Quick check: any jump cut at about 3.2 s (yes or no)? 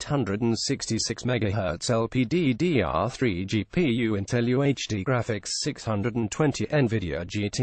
yes